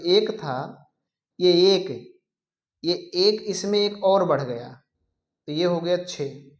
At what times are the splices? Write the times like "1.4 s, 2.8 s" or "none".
none